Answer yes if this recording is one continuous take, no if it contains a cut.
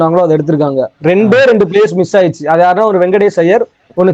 yes